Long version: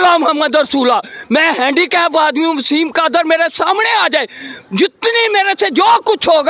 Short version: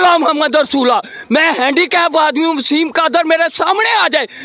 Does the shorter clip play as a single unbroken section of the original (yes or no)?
yes